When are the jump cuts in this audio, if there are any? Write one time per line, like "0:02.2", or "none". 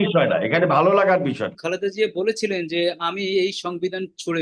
0:01.6